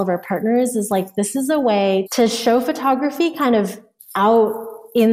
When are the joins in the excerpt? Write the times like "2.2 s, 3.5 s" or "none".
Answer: 2.1 s